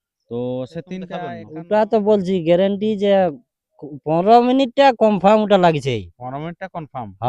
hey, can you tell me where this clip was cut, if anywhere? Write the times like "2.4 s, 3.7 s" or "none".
1.4 s